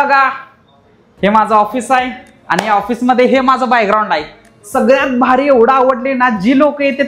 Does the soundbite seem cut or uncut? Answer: uncut